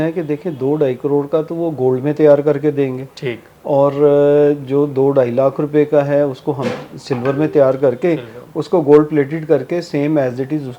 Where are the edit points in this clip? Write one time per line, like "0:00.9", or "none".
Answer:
none